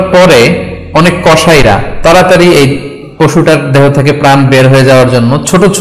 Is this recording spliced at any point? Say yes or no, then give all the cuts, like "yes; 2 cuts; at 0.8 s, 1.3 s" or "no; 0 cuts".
no; 0 cuts